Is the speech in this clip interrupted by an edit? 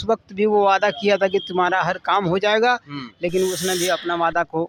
no; 0 cuts

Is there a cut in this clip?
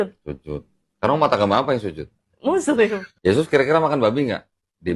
yes; 1 cut; at 3.1 s

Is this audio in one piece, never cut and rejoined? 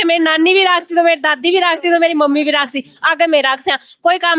yes; 0 cuts

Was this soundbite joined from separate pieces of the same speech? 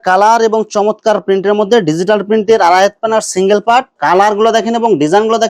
yes; 1 cut; at 3.9 s

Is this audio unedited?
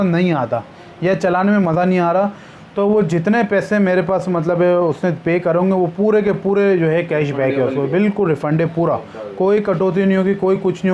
yes; 0 cuts

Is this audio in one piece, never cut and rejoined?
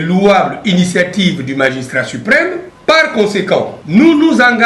no; 2 cuts; at 2.7 s, 3.8 s

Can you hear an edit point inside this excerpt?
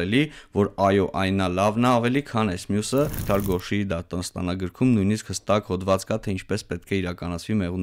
yes; 1 cut; at 3.2 s

